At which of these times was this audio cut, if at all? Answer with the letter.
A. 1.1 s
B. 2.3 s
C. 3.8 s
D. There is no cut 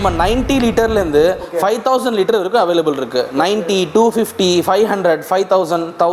D